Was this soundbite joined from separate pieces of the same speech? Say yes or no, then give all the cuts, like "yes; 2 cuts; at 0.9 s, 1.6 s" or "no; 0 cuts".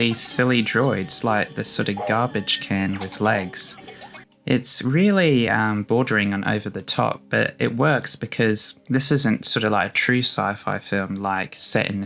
no; 0 cuts